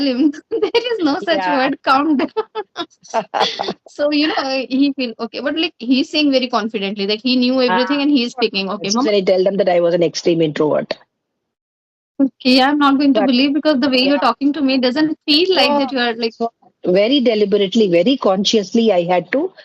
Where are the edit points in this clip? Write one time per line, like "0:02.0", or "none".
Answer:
0:09.1